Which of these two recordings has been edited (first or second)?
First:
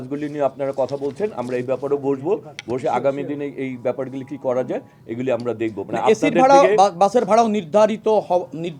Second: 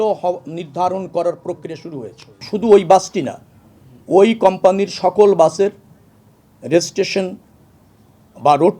second